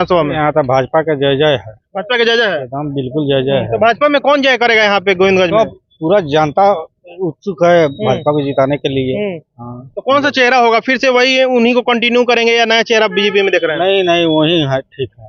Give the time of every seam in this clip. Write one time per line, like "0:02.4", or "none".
none